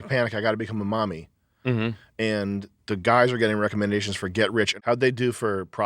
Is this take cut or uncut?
cut